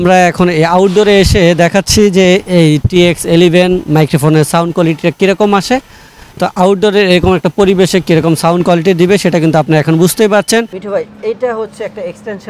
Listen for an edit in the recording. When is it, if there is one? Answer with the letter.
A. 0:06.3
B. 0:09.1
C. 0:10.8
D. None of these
C